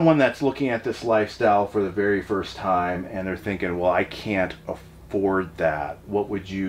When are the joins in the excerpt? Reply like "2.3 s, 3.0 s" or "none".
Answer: none